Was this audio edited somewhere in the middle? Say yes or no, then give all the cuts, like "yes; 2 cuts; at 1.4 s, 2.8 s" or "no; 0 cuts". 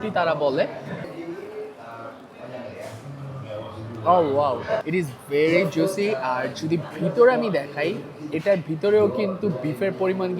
yes; 2 cuts; at 1.0 s, 4.8 s